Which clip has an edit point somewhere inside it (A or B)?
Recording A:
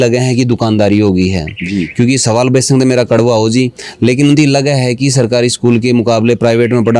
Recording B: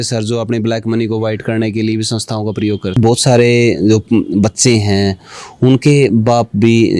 B